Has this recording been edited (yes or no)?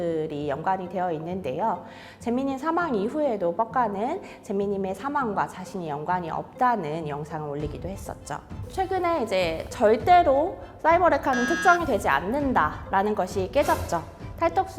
yes